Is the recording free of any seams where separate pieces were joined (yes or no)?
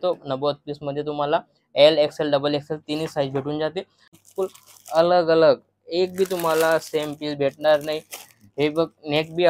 no